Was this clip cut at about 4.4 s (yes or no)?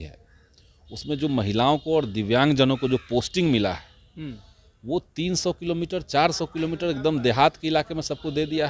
no